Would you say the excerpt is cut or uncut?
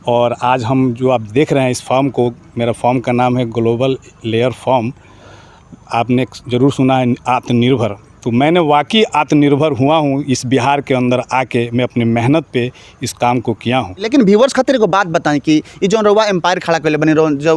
uncut